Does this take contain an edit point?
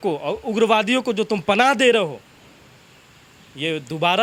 no; 0 cuts

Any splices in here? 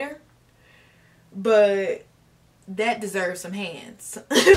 no; 0 cuts

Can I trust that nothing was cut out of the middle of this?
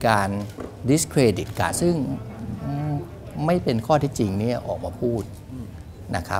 no; 1 cut; at 1.8 s

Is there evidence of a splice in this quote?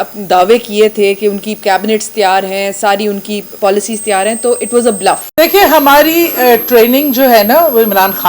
yes; 1 cut; at 5.2 s

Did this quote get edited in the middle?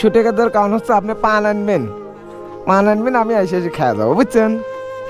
no; 0 cuts

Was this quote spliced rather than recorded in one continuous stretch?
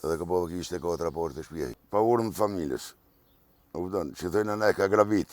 yes; 1 cut; at 1.7 s

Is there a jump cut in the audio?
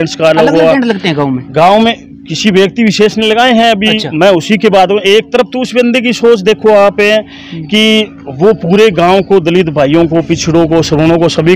no; 0 cuts

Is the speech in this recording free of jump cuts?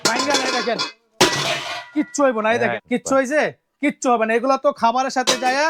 no; 1 cut; at 2.7 s

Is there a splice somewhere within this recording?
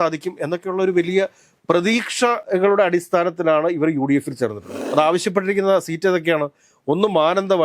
yes; 2 cuts; at 2.4 s, 4.8 s

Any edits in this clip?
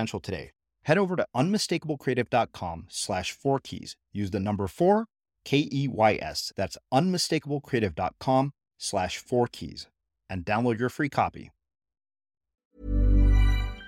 yes; 1 cut; at 12.7 s

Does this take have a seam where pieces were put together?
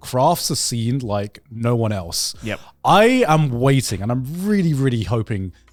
no; 0 cuts

